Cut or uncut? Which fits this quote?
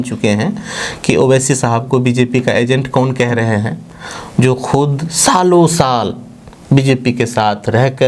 uncut